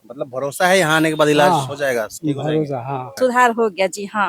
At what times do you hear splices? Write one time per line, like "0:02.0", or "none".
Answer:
0:03.1